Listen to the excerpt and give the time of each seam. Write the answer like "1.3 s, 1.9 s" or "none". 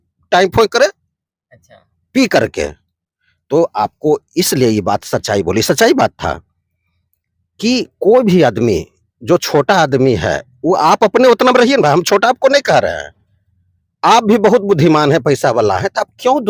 none